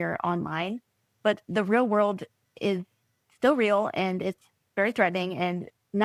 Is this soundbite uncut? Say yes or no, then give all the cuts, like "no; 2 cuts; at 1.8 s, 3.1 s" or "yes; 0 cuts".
yes; 0 cuts